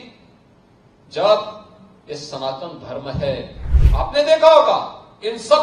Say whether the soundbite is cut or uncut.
cut